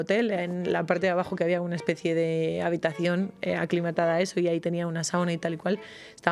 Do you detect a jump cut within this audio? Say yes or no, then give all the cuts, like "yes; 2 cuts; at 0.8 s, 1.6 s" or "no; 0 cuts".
no; 0 cuts